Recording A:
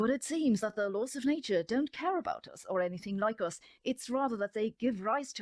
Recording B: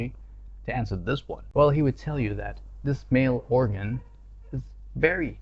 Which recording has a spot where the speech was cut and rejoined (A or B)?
B